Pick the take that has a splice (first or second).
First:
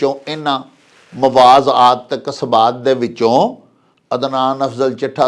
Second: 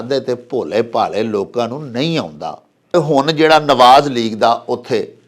second